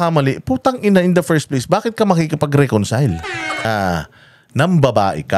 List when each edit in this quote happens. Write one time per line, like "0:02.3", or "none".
0:03.6